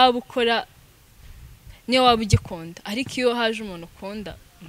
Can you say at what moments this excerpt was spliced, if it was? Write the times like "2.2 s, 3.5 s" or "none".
none